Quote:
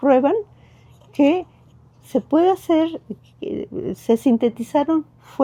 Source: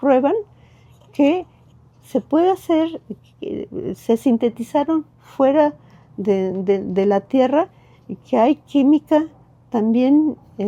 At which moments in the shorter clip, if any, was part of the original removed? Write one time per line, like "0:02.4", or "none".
none